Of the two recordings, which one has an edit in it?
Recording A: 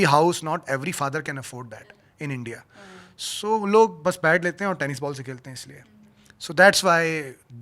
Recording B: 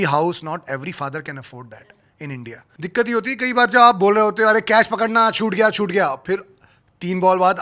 B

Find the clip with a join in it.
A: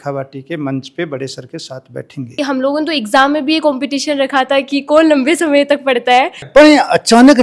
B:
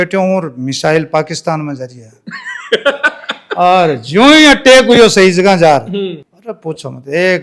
A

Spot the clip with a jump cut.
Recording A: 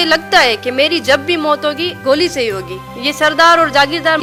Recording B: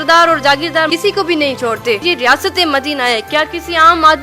B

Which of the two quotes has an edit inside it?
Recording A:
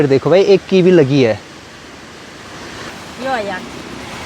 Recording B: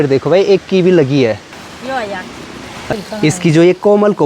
B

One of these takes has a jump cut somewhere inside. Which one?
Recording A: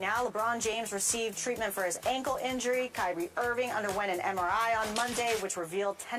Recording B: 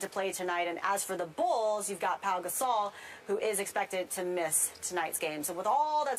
B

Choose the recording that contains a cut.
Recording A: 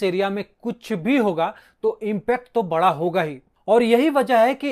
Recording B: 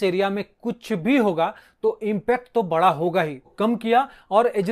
B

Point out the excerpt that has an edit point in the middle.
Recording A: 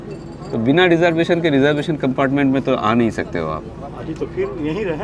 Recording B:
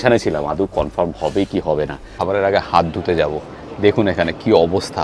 B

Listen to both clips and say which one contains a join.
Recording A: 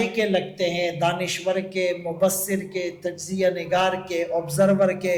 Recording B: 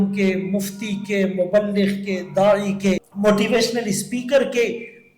B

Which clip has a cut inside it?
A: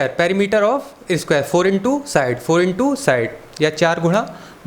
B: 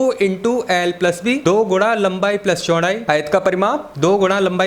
B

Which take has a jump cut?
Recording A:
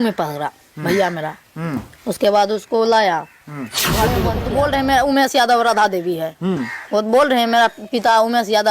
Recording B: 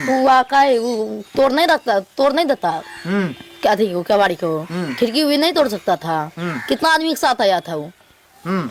A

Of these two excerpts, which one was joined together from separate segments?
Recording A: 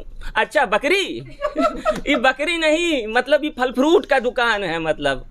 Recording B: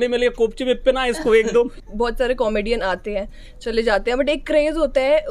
B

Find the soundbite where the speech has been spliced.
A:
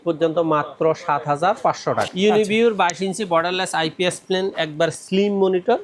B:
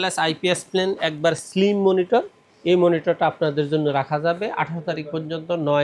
A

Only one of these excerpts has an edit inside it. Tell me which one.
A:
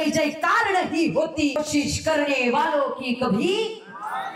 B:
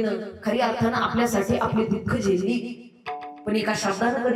A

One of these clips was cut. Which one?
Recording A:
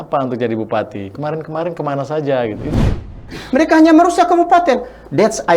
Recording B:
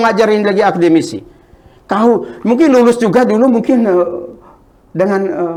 A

